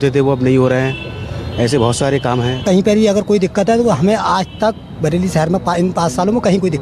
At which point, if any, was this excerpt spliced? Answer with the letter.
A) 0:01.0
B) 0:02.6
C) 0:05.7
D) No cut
B